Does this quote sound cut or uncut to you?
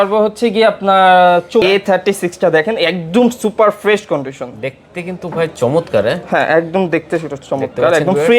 cut